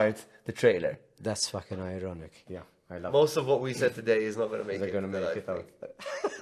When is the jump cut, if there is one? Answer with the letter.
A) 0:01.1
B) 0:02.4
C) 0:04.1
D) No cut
D